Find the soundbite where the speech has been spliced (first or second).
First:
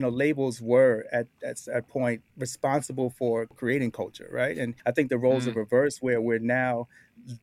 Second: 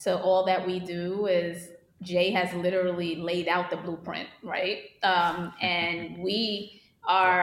first